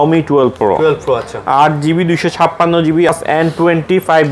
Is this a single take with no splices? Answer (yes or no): no